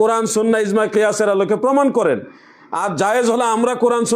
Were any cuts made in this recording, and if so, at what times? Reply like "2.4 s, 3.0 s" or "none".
none